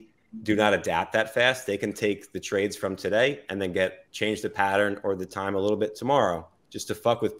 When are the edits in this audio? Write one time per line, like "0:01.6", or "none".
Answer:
none